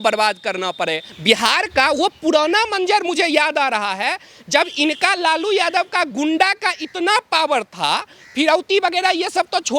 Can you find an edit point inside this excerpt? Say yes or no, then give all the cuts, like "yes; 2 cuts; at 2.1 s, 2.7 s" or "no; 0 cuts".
yes; 1 cut; at 1.1 s